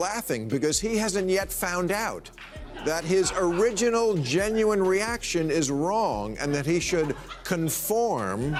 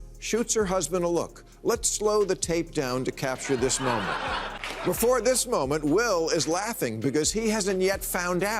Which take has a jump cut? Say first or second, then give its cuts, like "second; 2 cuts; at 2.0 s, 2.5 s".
second; 1 cut; at 4.7 s